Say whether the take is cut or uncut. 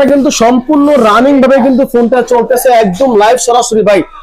uncut